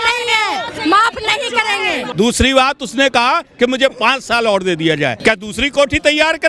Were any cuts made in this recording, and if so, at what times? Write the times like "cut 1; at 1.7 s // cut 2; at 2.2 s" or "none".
cut 1; at 2.1 s // cut 2; at 5.2 s